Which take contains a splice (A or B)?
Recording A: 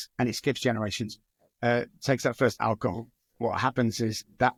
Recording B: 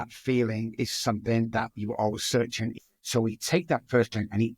B